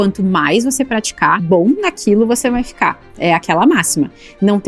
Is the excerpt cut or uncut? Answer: cut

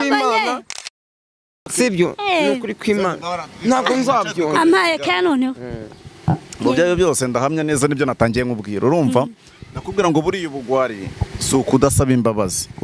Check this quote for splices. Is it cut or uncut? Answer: uncut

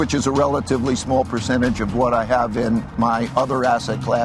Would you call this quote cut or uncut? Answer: uncut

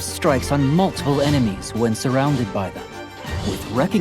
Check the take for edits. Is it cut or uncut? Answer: cut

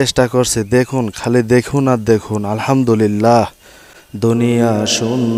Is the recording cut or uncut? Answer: uncut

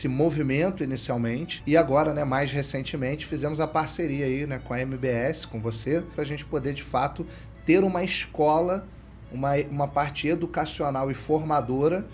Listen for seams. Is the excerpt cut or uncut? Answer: cut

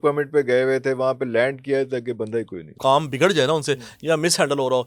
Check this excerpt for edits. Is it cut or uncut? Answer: cut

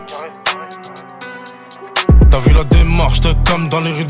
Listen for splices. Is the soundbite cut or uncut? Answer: cut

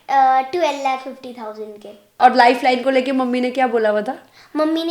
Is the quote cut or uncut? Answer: cut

